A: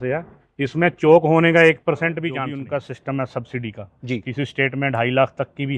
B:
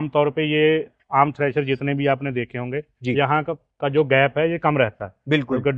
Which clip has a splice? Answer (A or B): A